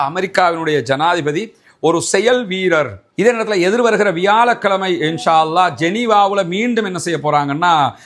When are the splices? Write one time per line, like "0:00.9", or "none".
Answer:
0:03.1